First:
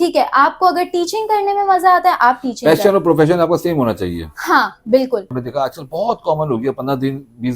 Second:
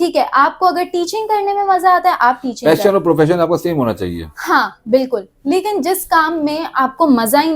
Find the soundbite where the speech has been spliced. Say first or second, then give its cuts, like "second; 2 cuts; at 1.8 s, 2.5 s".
first; 1 cut; at 5.4 s